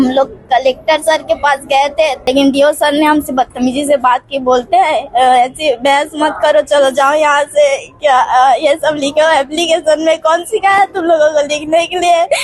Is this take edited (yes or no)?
yes